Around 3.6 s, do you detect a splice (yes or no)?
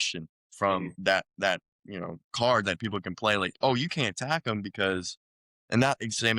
no